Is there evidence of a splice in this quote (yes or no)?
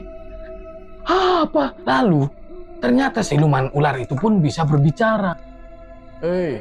no